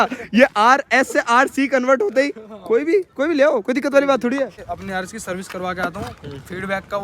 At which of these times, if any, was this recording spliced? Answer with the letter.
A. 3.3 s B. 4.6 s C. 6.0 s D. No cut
B